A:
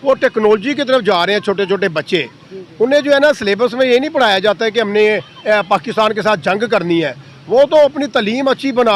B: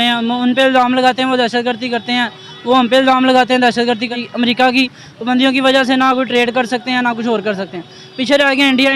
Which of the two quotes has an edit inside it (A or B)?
B